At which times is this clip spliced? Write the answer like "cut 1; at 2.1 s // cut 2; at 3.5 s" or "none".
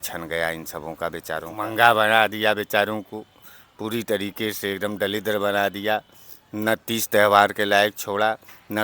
cut 1; at 1.5 s